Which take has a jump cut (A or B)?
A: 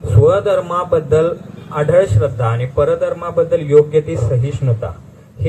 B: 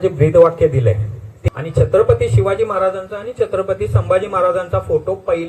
B